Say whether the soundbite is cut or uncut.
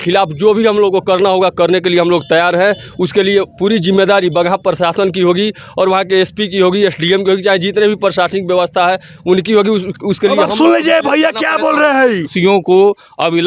cut